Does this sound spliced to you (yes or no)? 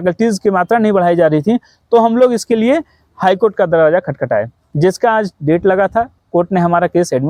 no